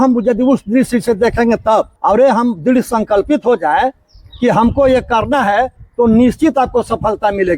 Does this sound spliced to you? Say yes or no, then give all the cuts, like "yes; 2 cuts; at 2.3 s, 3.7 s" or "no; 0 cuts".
yes; 1 cut; at 1.9 s